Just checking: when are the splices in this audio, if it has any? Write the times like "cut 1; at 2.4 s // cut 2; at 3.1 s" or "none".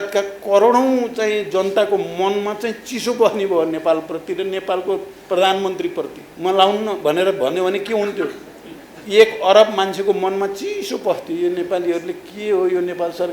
cut 1; at 6.2 s